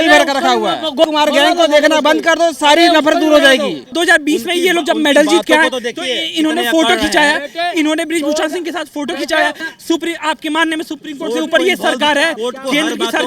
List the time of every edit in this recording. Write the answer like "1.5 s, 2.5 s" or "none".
1.0 s, 3.9 s, 9.7 s